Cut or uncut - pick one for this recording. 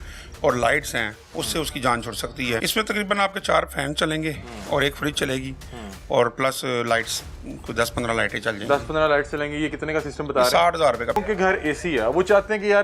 cut